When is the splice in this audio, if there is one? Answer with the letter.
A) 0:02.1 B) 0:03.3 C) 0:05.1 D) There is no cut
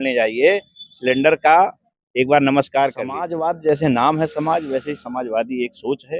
B